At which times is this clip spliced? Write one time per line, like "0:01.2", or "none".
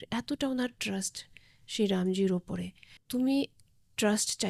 0:03.0